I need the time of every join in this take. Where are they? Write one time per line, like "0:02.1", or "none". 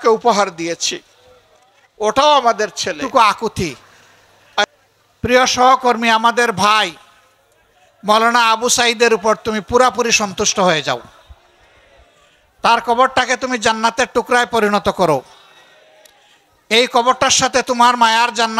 0:03.0